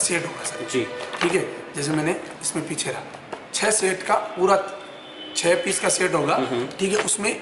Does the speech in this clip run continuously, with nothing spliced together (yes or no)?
yes